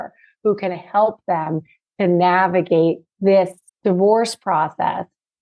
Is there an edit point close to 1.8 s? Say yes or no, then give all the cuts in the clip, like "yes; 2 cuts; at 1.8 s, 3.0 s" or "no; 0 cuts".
no; 1 cut; at 3.2 s